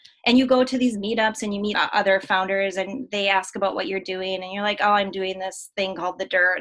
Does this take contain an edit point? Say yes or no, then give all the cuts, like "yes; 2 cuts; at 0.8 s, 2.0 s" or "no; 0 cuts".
yes; 1 cut; at 1.7 s